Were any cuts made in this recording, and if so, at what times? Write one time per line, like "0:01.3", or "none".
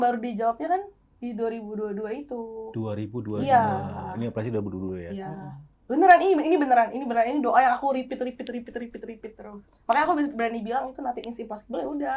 none